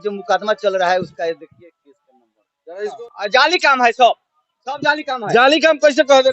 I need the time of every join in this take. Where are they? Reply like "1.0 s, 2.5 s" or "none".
3.0 s

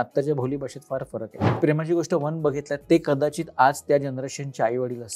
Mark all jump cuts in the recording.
1.6 s

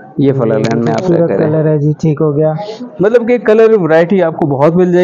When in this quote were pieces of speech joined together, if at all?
none

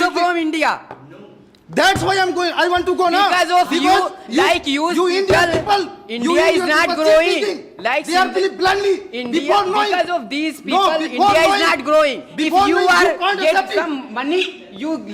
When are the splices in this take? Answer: none

